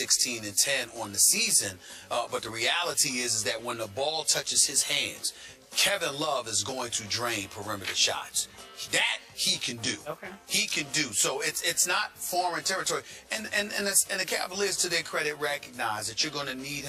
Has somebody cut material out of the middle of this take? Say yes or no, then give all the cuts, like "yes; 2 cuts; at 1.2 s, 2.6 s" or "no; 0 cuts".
no; 0 cuts